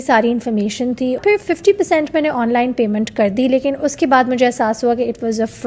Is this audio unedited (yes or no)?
no